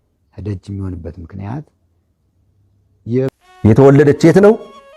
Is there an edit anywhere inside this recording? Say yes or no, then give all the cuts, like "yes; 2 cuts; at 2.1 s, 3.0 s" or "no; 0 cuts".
yes; 1 cut; at 3.3 s